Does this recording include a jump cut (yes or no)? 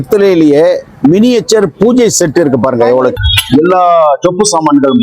yes